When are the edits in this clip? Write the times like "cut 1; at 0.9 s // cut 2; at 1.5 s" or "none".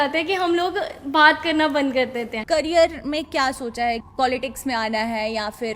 cut 1; at 2.4 s // cut 2; at 4.1 s